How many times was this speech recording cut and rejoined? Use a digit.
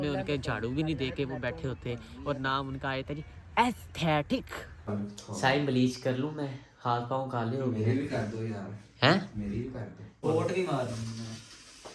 2